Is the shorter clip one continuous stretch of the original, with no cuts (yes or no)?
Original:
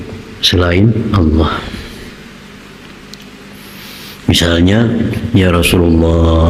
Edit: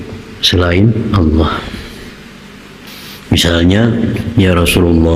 no